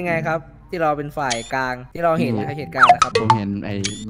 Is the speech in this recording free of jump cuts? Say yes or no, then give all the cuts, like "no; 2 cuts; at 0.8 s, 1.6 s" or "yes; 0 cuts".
no; 3 cuts; at 1.8 s, 2.8 s, 3.4 s